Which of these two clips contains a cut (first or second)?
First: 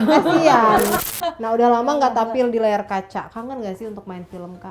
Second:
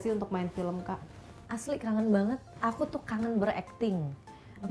first